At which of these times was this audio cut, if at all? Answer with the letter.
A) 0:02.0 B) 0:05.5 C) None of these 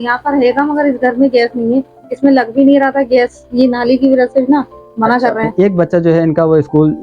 B